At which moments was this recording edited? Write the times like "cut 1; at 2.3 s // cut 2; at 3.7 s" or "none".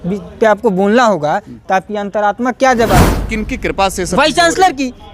cut 1; at 3.1 s